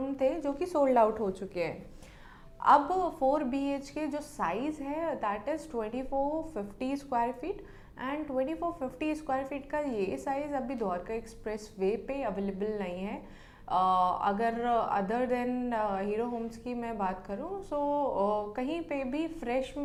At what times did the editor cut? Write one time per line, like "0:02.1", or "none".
none